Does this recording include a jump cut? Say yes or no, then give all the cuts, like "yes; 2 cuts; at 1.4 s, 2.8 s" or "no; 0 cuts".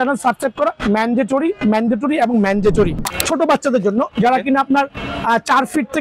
yes; 1 cut; at 3.0 s